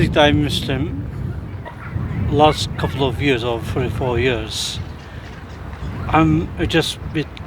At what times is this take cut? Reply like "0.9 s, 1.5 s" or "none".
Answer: 1.8 s